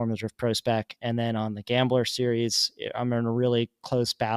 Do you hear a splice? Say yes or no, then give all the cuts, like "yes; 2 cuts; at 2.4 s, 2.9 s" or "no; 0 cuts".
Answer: no; 0 cuts